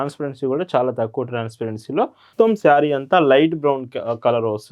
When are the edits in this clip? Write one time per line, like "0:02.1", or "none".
0:02.3